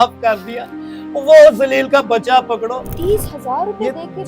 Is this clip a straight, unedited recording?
no; 1 cut; at 2.9 s

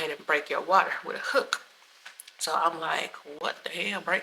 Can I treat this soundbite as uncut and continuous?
yes; 0 cuts

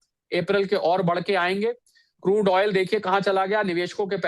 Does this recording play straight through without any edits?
yes; 0 cuts

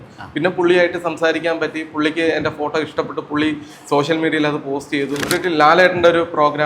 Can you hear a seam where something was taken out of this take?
yes; 1 cut; at 5.2 s

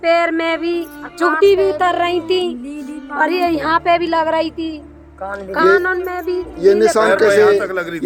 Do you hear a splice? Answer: no; 0 cuts

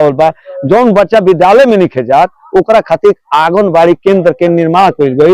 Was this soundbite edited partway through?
no; 0 cuts

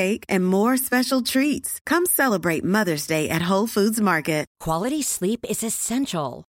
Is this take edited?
yes; 1 cut; at 4.5 s

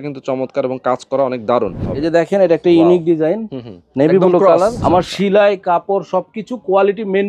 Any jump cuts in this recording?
yes; 2 cuts; at 1.8 s, 4.8 s

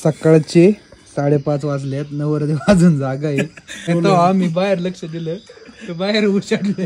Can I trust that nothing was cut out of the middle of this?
no; 1 cut; at 3.9 s

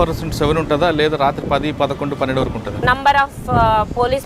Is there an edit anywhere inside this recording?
yes; 1 cut; at 2.7 s

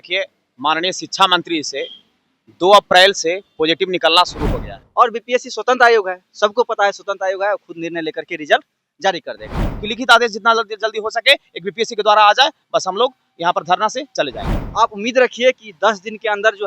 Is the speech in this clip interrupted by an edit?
yes; 3 cuts; at 4.8 s, 9.8 s, 14.7 s

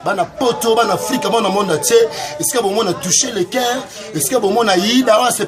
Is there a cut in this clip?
no; 0 cuts

